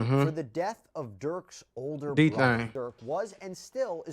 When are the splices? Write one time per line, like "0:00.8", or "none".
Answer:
0:02.7